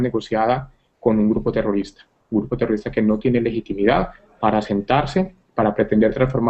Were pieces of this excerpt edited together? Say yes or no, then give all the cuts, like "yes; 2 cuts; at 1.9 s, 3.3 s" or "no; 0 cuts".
no; 0 cuts